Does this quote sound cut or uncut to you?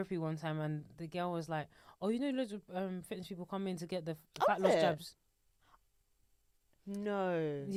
uncut